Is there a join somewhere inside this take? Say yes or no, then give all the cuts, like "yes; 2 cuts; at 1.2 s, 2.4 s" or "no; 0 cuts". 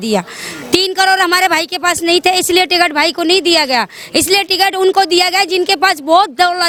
no; 0 cuts